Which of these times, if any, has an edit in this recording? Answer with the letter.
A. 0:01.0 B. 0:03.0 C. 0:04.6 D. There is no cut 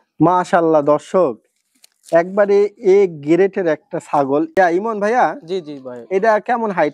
C